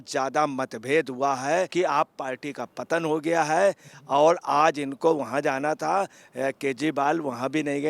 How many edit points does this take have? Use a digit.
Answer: 1